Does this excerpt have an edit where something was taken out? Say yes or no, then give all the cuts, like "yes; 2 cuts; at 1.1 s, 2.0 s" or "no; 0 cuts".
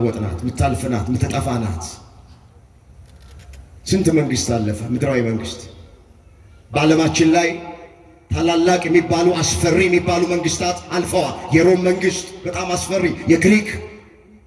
no; 0 cuts